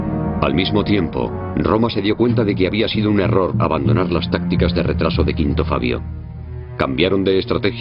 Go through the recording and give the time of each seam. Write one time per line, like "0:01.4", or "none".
none

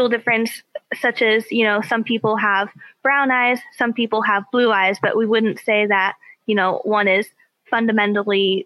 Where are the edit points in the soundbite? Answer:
none

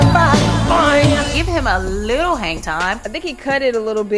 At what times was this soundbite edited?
0:01.4
0:03.0

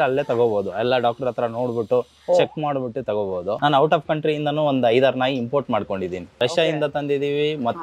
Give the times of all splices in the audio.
0:03.5
0:06.3

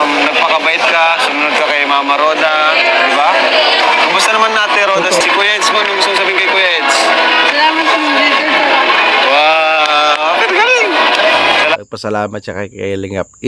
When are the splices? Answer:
0:05.2

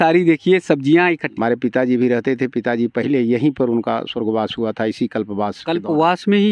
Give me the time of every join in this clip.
0:01.2

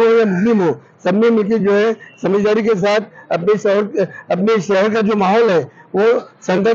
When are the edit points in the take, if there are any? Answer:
none

